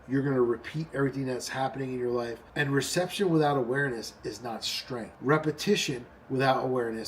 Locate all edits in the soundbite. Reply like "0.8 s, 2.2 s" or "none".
2.4 s, 5.1 s